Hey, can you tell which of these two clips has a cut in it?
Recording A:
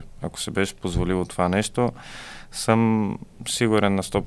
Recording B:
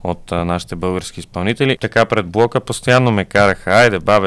B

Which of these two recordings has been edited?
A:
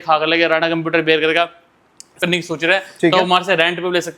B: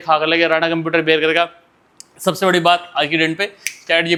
A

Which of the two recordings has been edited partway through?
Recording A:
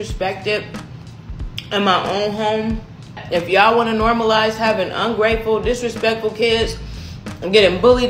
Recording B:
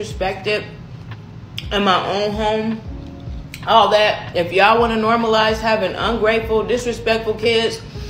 A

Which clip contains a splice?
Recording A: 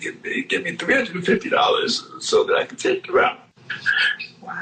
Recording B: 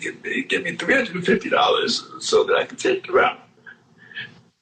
A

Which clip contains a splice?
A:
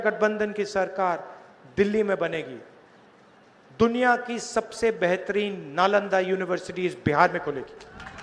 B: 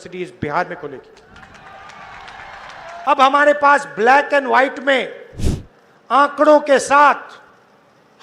B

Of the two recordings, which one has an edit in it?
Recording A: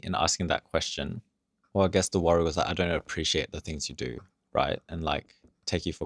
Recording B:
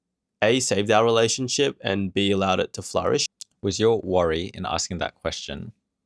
B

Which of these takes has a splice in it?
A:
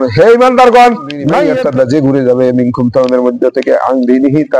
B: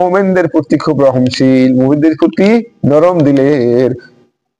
A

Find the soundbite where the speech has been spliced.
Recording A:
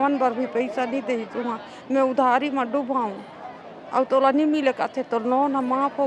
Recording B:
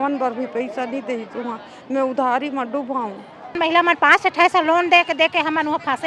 B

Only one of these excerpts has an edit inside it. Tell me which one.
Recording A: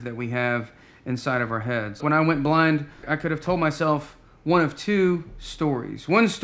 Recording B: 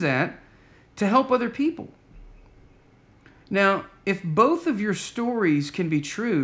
A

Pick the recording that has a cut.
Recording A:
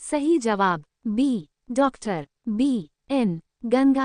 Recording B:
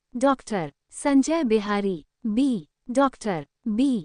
A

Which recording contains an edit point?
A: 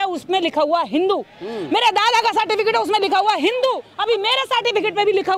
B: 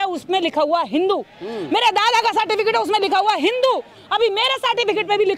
A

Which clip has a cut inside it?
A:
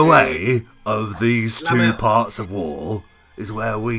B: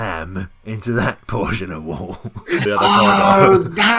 B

